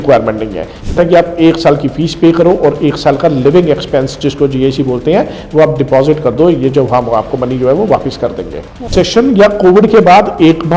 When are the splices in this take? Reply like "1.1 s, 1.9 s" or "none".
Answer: 0.9 s, 8.8 s